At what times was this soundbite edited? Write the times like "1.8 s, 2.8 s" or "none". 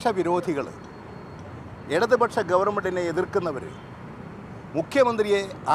none